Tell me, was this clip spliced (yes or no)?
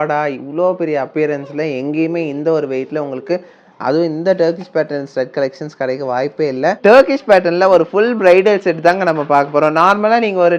yes